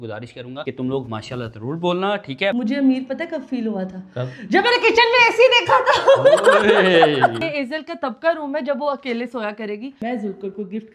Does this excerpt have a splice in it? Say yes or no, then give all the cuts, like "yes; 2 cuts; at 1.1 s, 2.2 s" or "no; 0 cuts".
yes; 3 cuts; at 2.5 s, 7.4 s, 10.0 s